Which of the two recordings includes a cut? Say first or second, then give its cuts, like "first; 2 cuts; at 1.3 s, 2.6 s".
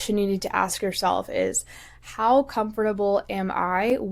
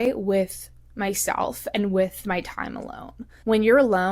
second; 1 cut; at 3.2 s